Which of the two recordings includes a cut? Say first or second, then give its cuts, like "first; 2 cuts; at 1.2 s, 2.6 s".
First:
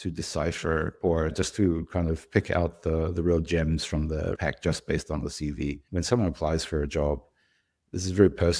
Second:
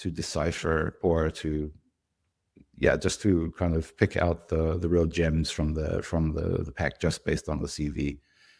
first; 3 cuts; at 1.3 s, 4.4 s, 5.8 s